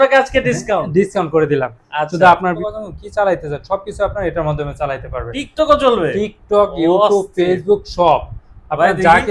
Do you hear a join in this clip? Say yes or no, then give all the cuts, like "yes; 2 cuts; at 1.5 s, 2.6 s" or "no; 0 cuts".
yes; 1 cut; at 2.6 s